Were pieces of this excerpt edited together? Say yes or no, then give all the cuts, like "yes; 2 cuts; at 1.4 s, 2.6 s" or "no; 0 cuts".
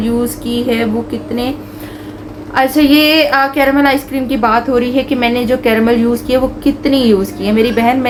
no; 0 cuts